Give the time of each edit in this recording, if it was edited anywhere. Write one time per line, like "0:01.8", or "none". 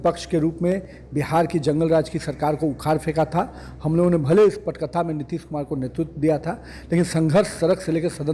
none